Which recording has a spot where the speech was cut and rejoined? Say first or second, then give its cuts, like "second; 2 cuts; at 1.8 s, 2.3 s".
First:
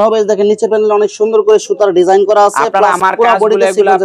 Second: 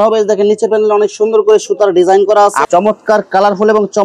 second; 1 cut; at 2.7 s